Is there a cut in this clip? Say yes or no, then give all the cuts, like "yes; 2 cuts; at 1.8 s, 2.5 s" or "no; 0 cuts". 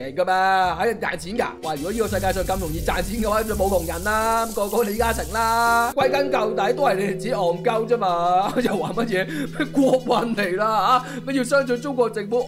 no; 0 cuts